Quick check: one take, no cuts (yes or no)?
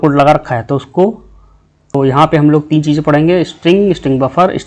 no